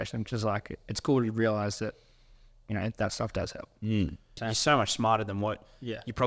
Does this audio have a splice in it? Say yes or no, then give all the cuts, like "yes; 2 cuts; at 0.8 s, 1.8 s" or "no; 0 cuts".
yes; 1 cut; at 4.4 s